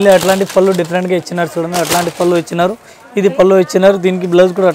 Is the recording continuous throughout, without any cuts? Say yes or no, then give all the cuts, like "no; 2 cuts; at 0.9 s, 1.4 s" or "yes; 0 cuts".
yes; 0 cuts